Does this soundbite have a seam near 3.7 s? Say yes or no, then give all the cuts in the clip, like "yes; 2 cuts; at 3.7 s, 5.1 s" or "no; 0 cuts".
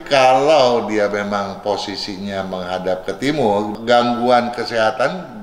yes; 1 cut; at 3.7 s